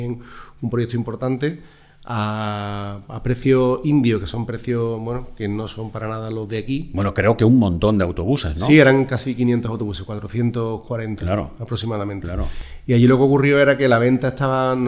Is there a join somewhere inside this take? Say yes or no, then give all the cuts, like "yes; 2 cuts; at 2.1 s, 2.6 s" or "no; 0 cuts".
no; 0 cuts